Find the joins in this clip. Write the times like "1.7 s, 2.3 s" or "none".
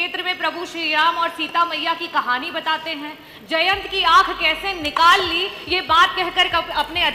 none